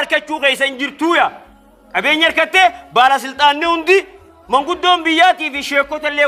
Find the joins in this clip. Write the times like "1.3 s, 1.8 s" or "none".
none